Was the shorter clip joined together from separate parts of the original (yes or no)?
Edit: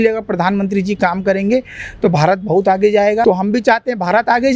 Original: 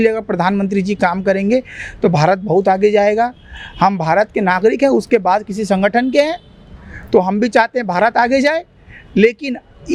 yes